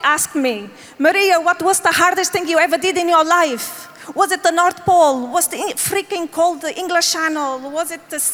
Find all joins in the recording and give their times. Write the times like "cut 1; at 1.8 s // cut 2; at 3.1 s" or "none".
none